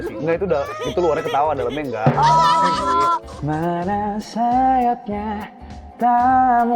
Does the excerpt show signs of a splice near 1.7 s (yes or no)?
no